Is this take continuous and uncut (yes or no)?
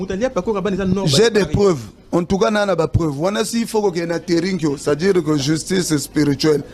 yes